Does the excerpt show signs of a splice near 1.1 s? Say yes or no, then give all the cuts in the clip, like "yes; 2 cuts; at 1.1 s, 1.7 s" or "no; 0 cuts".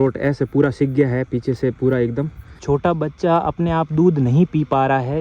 no; 1 cut; at 2.6 s